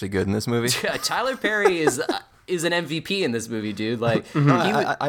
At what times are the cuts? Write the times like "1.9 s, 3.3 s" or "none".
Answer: none